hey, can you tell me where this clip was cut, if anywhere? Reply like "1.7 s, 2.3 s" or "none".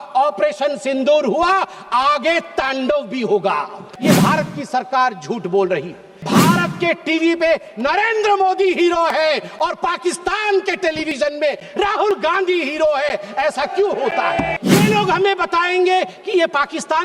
3.9 s, 6.1 s, 14.5 s